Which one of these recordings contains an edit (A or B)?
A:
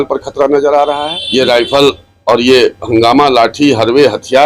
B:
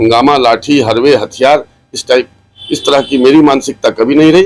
A